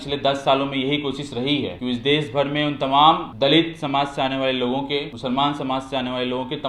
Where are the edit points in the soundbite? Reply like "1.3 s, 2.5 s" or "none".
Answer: 1.8 s, 3.3 s, 5.1 s

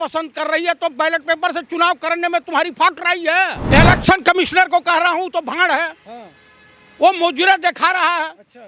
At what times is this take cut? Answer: 3.6 s

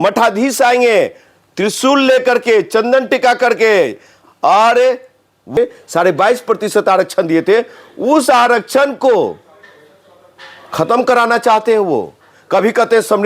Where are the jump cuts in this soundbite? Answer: 5.6 s

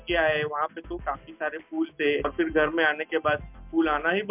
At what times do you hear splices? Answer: none

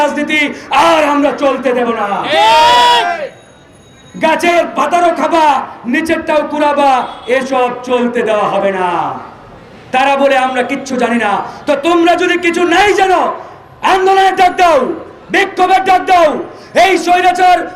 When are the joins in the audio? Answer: none

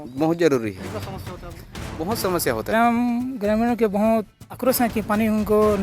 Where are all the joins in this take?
2.7 s

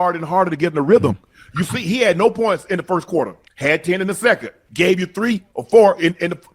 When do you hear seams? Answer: 3.4 s, 4.6 s

